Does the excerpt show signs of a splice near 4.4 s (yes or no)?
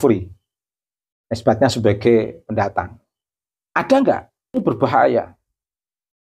yes